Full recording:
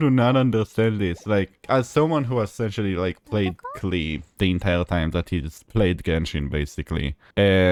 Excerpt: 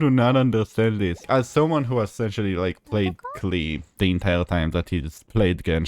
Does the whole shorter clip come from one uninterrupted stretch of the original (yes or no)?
no